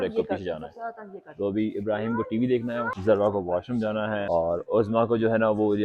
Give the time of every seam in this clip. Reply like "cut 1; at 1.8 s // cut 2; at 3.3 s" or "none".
cut 1; at 2.9 s // cut 2; at 4.2 s